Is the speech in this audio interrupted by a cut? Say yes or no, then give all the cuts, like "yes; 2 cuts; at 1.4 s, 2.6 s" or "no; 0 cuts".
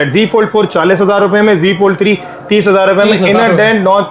no; 0 cuts